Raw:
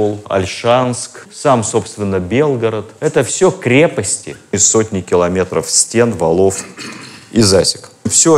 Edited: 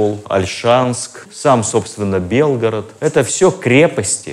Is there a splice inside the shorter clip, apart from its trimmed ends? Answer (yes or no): no